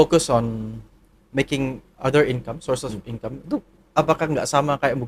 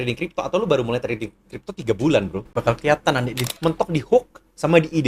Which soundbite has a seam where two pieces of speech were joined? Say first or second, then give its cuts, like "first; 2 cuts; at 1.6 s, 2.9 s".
second; 2 cuts; at 2.4 s, 3.5 s